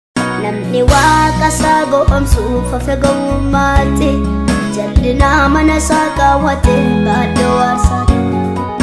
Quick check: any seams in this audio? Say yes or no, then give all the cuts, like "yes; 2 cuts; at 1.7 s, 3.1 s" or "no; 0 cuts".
no; 0 cuts